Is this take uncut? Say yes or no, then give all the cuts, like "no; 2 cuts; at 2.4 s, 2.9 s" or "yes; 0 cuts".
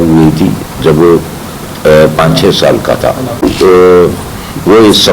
no; 1 cut; at 3.4 s